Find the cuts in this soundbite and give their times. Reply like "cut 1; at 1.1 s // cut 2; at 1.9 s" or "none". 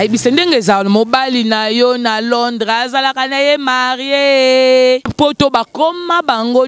cut 1; at 5.1 s